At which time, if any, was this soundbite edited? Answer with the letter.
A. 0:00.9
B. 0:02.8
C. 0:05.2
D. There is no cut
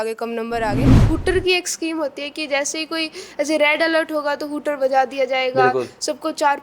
A